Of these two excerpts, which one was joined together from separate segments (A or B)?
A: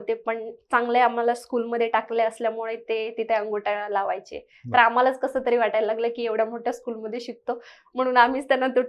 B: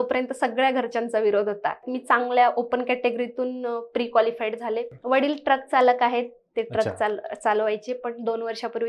B